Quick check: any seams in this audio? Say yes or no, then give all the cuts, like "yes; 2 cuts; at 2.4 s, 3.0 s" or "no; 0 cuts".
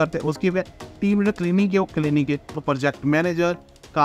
yes; 1 cut; at 2.6 s